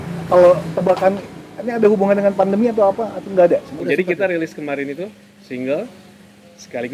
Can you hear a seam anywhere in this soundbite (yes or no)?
yes